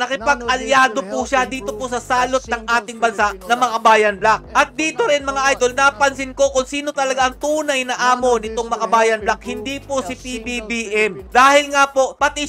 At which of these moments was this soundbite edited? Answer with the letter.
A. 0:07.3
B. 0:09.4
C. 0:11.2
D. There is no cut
D